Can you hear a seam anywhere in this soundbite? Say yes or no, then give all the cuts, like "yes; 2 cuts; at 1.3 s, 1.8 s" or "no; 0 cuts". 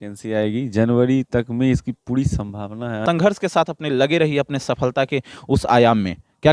yes; 1 cut; at 3.0 s